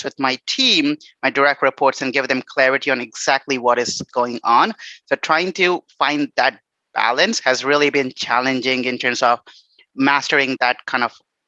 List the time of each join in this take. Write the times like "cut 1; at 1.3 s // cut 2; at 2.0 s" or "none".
cut 1; at 4.0 s // cut 2; at 10.6 s